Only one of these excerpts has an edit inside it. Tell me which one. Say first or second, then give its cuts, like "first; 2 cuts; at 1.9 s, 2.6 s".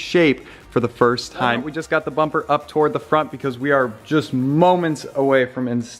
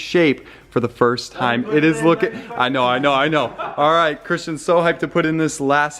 first; 1 cut; at 1.6 s